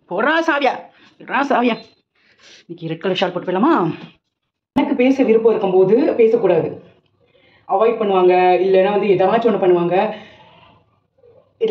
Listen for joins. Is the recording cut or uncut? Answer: cut